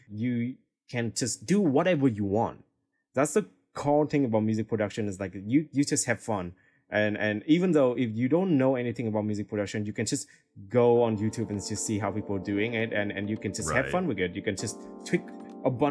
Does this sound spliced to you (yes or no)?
no